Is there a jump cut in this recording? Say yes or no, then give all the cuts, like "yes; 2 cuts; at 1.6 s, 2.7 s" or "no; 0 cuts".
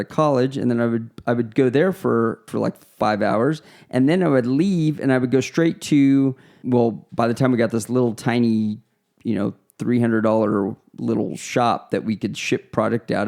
yes; 2 cuts; at 2.5 s, 6.6 s